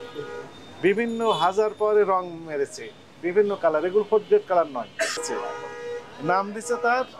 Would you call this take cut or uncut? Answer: cut